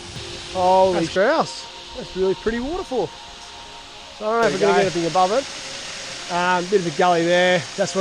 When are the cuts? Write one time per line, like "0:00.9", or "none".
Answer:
0:01.1
0:05.5